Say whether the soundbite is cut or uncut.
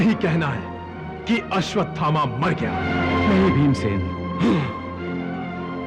cut